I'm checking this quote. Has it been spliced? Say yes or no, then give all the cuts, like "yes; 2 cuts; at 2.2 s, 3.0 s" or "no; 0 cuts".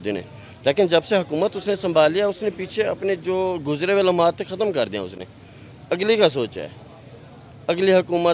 no; 0 cuts